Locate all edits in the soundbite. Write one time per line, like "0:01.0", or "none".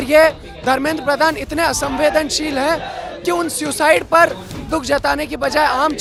none